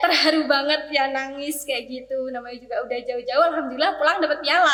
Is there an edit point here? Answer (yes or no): no